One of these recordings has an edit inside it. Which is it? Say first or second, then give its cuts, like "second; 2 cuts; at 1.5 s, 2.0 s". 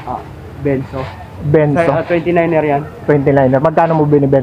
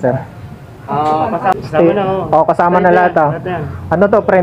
second; 1 cut; at 1.6 s